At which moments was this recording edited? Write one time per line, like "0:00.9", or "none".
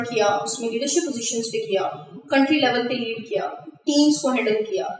none